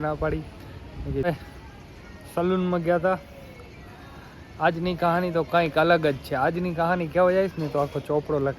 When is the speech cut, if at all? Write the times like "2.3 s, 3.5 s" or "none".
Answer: 1.3 s